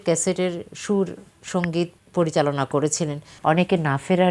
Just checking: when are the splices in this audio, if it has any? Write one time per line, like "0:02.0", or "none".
0:01.6
0:03.2